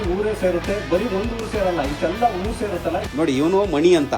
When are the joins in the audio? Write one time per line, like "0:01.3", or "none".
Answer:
0:03.1